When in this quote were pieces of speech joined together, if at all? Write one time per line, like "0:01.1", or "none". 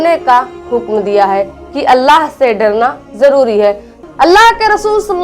0:03.9